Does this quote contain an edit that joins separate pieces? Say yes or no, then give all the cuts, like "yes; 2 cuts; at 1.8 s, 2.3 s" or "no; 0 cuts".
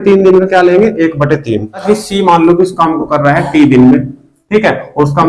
yes; 1 cut; at 1.8 s